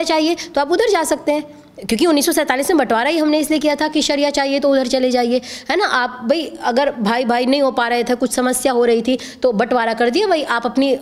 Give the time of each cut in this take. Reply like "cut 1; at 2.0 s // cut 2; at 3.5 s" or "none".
none

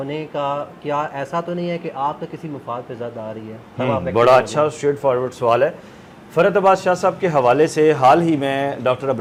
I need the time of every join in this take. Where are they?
none

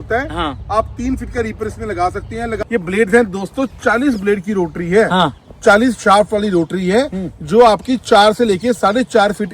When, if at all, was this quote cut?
cut 1; at 2.6 s

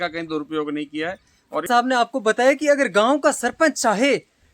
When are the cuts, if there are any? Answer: cut 1; at 1.7 s

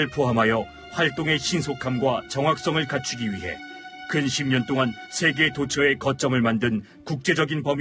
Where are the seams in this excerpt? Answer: none

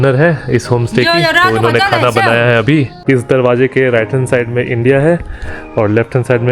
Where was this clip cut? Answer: cut 1; at 2.9 s

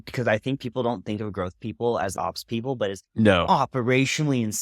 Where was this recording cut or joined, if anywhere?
cut 1; at 2.1 s

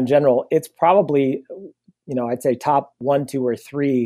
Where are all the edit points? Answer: cut 1; at 3.0 s

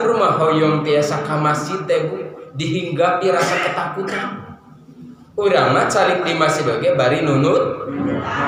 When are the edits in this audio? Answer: none

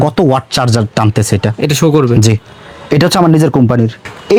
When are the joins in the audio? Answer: none

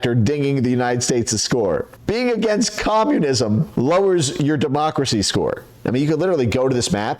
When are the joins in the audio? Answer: cut 1; at 1.9 s // cut 2; at 3.7 s // cut 3; at 5.8 s

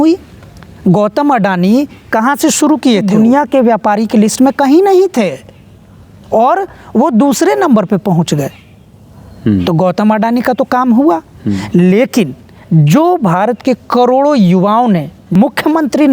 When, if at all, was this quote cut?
cut 1; at 3.1 s // cut 2; at 15.4 s

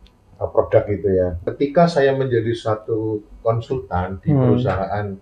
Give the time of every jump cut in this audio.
cut 1; at 1.4 s

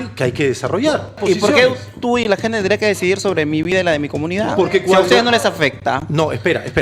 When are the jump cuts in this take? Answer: cut 1; at 1.2 s

